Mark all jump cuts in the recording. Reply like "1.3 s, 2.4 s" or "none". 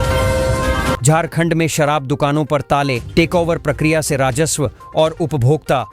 1.0 s